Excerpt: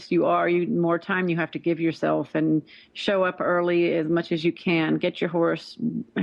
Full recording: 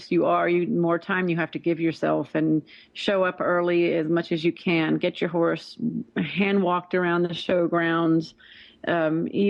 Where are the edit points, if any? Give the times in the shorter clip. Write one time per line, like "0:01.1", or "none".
none